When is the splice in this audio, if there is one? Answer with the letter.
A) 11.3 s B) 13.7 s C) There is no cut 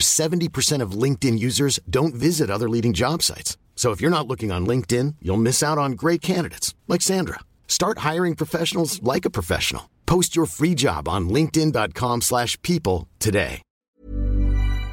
B